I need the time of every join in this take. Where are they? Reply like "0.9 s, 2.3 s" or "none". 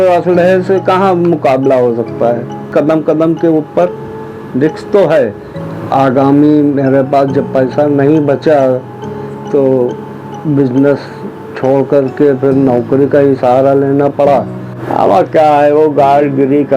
2.7 s, 5.5 s, 14.8 s